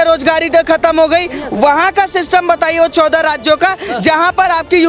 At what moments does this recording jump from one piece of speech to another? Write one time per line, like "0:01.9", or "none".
none